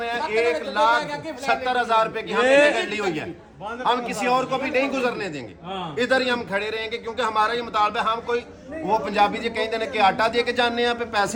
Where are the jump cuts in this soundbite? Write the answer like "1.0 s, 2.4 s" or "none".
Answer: none